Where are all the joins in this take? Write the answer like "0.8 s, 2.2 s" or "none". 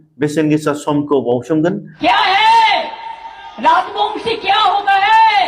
1.9 s